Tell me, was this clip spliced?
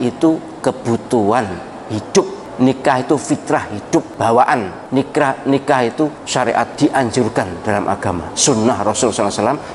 yes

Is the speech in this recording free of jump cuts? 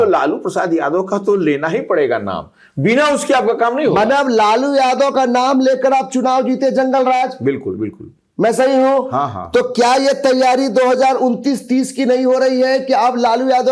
yes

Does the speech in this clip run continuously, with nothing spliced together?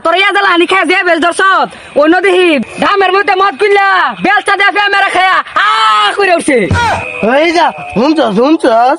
yes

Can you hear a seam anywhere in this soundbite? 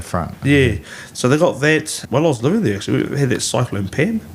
yes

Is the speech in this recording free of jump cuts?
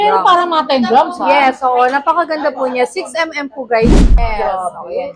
no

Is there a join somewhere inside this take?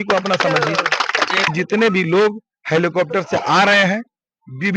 yes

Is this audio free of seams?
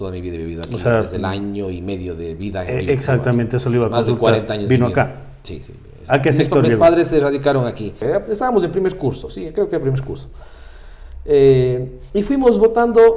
no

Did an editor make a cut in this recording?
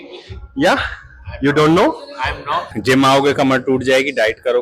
yes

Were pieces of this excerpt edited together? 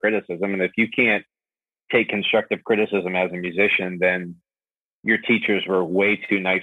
no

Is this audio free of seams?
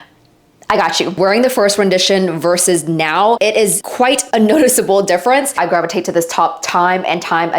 no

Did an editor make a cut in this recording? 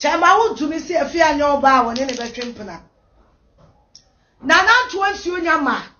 yes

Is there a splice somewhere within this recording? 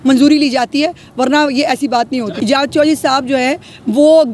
yes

